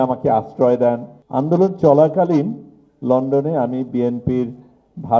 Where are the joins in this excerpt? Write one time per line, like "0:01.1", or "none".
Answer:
0:01.1